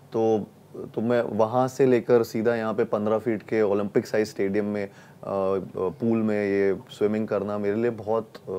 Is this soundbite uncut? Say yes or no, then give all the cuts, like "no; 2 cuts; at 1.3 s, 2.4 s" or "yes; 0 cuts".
yes; 0 cuts